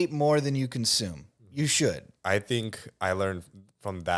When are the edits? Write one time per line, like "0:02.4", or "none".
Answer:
0:02.1